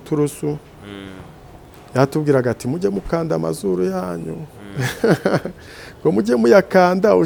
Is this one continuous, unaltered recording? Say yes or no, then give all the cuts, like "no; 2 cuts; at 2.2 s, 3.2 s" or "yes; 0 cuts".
yes; 0 cuts